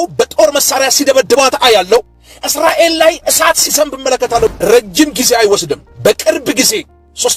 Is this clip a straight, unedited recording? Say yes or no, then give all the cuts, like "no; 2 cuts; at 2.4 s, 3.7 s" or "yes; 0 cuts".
no; 1 cut; at 4.5 s